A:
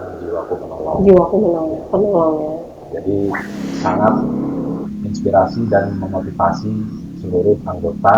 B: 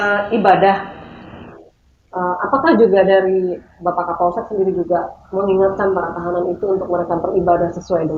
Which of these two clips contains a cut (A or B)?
A